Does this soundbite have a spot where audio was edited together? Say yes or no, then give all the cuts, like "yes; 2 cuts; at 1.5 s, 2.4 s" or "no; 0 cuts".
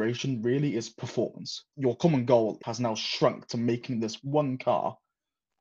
yes; 2 cuts; at 1.7 s, 2.6 s